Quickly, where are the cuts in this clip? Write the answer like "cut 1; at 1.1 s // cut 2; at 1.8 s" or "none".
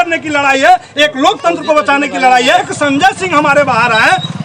cut 1; at 2.7 s